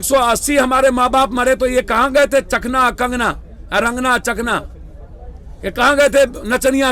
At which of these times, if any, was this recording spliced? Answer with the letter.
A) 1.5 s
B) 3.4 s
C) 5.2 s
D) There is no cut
D